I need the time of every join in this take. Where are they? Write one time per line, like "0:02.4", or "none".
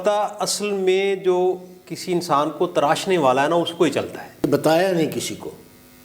0:04.4